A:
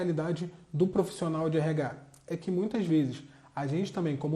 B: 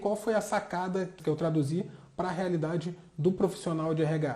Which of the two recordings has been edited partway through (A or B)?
B